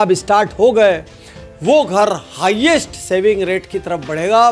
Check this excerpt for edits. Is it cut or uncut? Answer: uncut